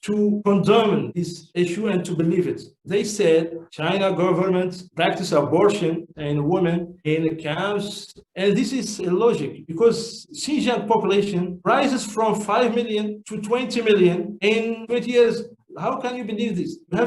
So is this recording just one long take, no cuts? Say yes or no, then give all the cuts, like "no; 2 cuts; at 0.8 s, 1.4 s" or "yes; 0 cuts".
yes; 0 cuts